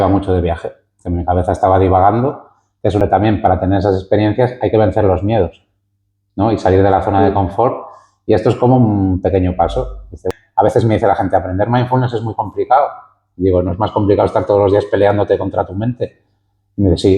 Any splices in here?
yes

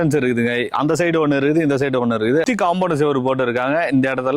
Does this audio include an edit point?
yes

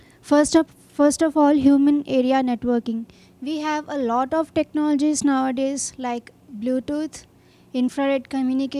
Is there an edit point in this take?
no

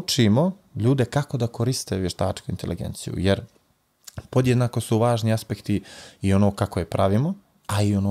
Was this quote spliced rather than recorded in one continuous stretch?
no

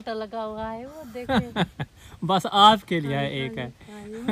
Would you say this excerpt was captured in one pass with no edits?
yes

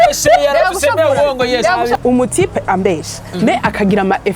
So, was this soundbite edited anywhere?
yes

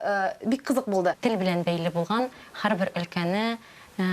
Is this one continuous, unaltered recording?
no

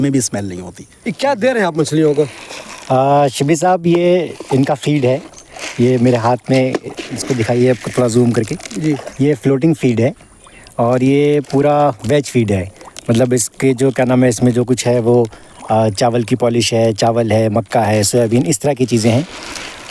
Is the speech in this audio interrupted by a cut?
no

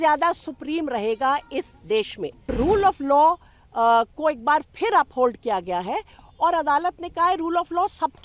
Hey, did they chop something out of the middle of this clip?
yes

